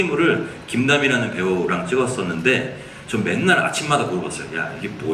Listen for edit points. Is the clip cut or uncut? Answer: uncut